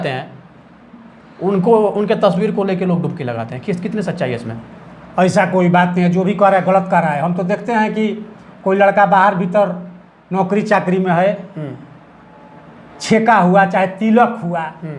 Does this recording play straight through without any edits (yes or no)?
yes